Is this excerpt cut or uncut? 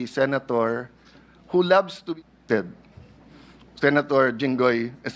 cut